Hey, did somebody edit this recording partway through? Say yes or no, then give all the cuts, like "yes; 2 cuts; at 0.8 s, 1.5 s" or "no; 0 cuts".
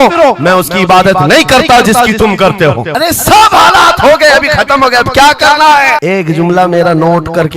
no; 0 cuts